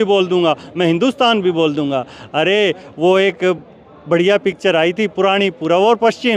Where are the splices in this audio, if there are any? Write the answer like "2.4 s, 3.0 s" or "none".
none